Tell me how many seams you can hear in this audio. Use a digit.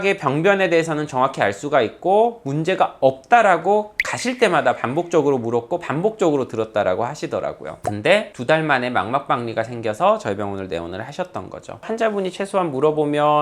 1